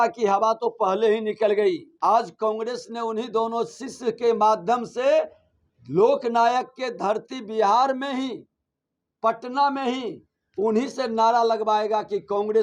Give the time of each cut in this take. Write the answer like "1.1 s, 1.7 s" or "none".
1.9 s